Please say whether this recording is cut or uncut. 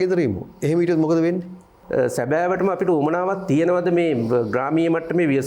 cut